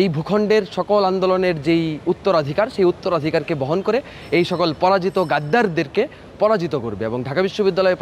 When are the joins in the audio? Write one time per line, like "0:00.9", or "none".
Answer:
none